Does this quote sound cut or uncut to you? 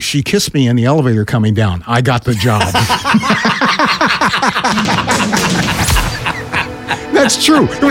uncut